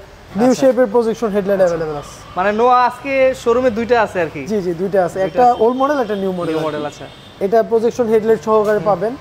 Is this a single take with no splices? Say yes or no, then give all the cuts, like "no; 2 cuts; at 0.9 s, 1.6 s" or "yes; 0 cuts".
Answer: yes; 0 cuts